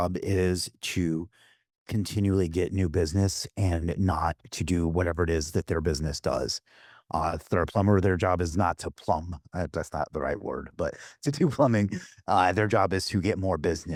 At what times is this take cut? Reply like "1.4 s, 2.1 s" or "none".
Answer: none